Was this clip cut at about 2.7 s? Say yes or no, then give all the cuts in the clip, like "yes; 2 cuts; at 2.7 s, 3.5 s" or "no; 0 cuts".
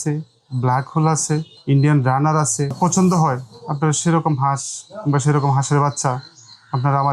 yes; 2 cuts; at 1.5 s, 2.7 s